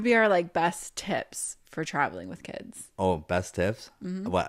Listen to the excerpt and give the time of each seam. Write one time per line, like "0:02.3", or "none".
0:02.9